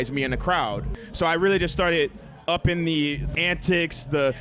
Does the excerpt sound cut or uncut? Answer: cut